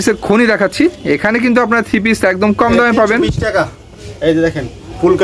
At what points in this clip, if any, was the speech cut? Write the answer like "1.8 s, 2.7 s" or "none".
none